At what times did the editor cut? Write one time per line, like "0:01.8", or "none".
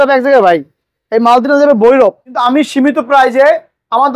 0:02.3